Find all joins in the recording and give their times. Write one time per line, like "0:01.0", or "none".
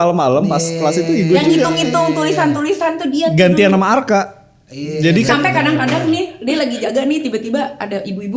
none